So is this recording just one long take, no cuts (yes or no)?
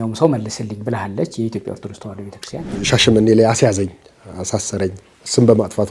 no